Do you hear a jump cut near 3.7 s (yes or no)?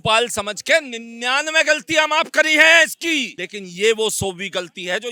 no